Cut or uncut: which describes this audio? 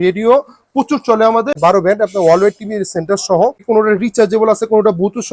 cut